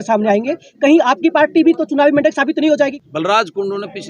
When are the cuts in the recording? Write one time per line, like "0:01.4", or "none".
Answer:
0:03.0